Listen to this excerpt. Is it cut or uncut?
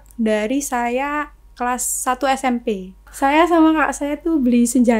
cut